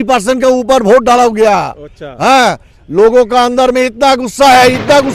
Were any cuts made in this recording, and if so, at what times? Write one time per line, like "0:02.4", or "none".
none